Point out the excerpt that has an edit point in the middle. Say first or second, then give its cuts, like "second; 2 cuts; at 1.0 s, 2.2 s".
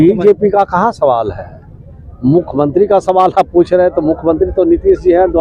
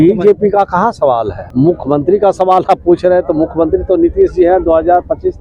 second; 1 cut; at 1.4 s